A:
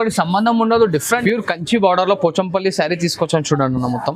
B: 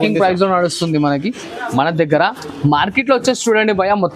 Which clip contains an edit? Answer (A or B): A